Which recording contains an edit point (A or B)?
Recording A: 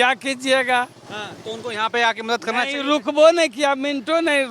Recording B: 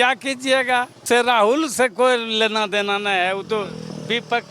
B